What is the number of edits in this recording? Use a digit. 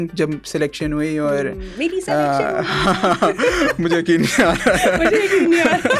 0